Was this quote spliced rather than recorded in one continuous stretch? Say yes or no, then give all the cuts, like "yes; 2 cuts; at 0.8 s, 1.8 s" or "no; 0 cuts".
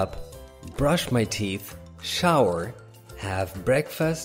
no; 0 cuts